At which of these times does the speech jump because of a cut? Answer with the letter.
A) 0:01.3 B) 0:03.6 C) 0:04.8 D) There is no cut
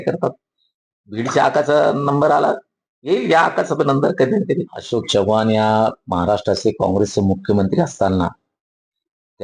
C